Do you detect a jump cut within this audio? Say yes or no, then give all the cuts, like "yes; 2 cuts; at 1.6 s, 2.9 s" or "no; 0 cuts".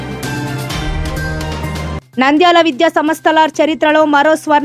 no; 0 cuts